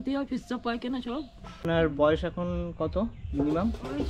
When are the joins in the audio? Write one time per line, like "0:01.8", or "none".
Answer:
0:01.7

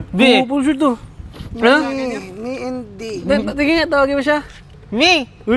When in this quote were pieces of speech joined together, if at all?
none

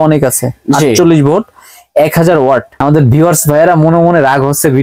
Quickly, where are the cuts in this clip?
none

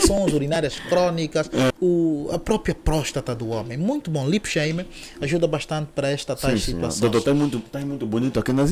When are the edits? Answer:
0:01.7

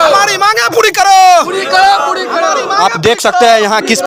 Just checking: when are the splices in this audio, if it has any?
none

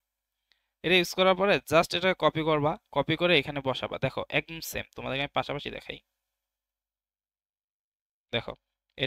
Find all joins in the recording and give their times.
none

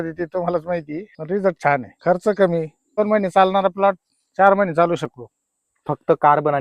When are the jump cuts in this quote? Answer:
0:01.1
0:01.9
0:03.0

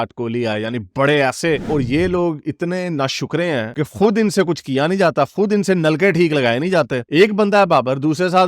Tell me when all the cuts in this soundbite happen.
0:01.6
0:07.0

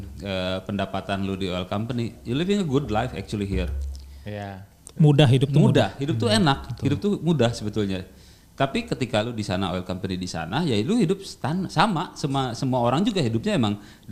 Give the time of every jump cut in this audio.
none

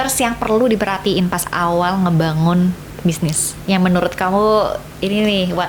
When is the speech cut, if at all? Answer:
none

